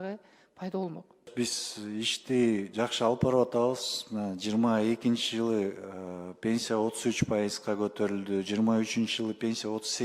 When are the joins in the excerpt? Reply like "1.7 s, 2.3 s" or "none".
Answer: 1.3 s